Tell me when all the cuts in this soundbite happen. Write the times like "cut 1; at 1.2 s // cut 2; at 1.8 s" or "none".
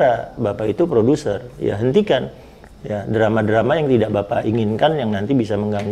none